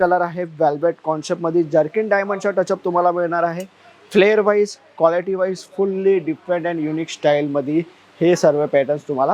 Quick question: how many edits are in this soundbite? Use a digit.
0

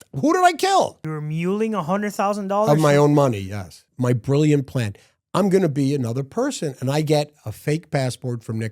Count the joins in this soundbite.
2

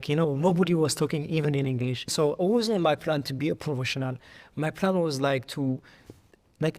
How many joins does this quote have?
0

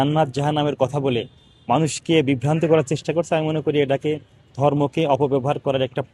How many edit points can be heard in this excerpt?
0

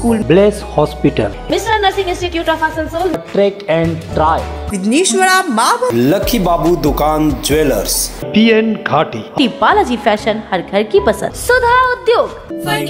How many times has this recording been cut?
2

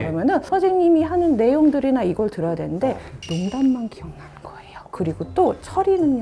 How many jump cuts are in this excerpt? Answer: 1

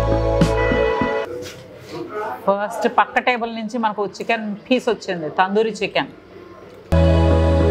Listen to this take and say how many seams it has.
2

